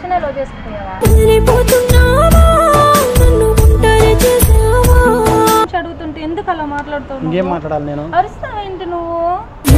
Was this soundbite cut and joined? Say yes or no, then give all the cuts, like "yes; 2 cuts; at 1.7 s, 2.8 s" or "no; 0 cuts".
yes; 1 cut; at 5.7 s